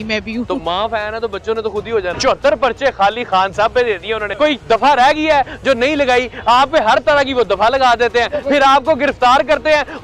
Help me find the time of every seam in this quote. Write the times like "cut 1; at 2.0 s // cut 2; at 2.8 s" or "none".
cut 1; at 2.1 s // cut 2; at 4.3 s